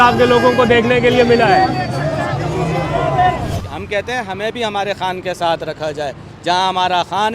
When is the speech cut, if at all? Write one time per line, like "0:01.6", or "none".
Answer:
0:03.6